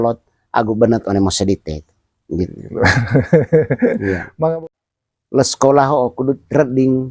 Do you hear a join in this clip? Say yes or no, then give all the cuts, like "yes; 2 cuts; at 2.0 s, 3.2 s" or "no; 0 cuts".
yes; 1 cut; at 4.5 s